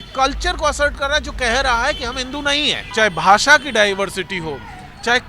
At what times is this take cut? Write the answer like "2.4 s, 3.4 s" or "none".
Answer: 2.8 s